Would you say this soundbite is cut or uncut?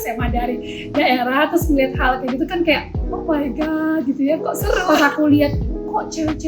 cut